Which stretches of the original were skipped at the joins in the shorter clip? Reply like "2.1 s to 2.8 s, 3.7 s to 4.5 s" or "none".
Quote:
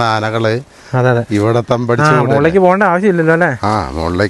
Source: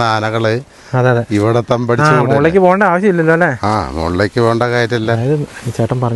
none